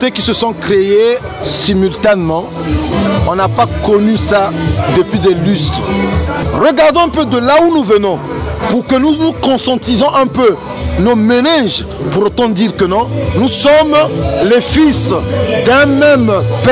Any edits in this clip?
yes; 1 cut; at 6.4 s

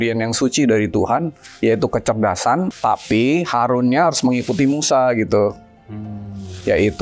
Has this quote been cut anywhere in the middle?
yes; 1 cut; at 2.7 s

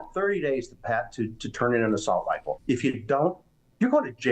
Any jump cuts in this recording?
yes; 1 cut; at 2.5 s

